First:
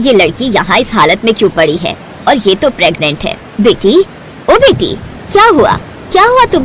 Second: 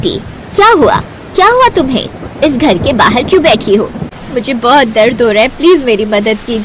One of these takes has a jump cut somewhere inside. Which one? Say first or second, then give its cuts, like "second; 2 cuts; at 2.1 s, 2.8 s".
second; 1 cut; at 4.1 s